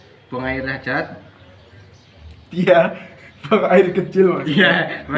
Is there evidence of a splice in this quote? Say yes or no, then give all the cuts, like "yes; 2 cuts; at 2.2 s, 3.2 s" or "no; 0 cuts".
no; 0 cuts